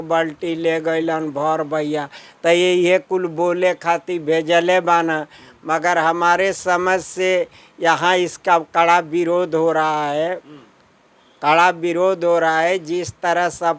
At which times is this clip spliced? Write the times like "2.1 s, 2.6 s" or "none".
none